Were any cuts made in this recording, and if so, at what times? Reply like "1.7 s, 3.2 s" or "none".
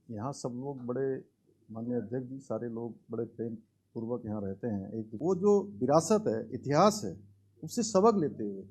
5.1 s